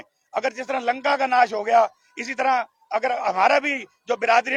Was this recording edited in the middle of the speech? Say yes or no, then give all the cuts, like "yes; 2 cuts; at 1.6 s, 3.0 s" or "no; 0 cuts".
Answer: no; 0 cuts